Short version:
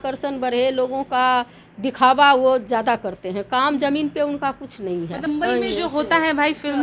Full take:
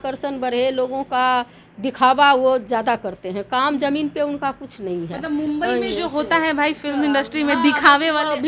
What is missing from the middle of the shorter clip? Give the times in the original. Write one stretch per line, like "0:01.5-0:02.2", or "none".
0:05.3-0:05.5